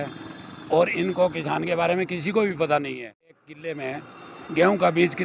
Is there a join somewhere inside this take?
yes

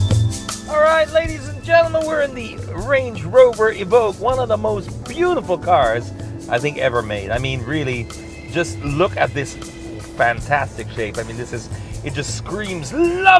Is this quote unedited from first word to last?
no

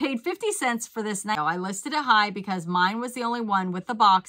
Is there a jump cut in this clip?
yes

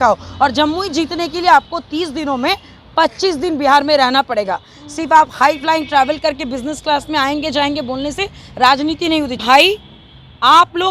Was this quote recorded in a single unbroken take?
no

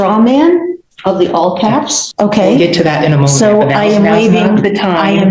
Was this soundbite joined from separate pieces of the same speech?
yes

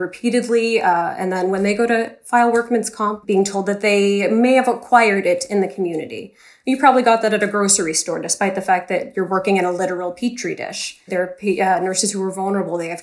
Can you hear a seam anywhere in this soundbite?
yes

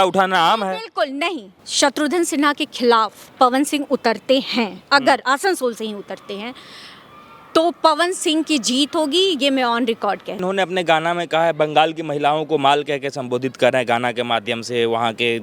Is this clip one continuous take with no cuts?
no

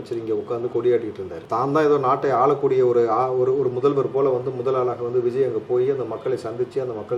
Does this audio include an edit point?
no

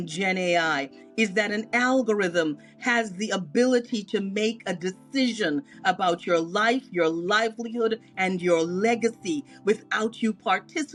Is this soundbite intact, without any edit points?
yes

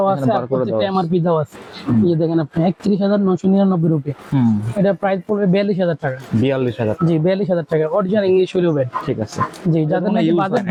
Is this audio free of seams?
yes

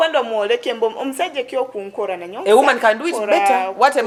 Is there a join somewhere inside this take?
no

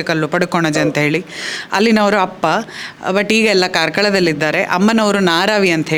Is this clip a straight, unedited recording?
yes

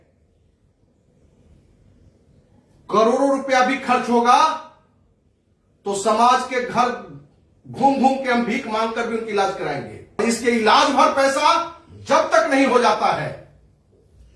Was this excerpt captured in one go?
no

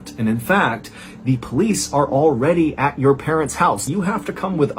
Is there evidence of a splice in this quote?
yes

